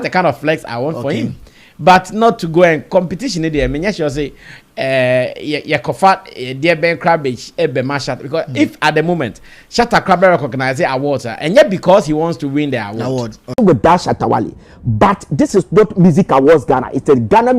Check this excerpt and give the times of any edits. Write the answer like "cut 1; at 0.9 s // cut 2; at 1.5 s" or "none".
cut 1; at 13.6 s